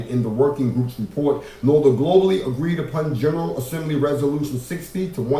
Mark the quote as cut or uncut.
cut